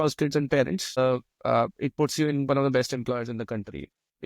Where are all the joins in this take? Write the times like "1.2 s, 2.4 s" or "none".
1.0 s